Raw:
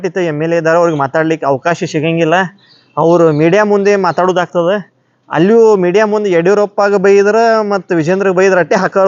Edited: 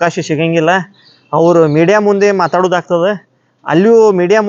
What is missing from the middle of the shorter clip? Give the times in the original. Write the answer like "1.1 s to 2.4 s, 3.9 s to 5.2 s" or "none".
none